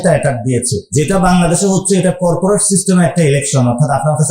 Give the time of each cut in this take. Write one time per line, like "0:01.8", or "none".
0:00.9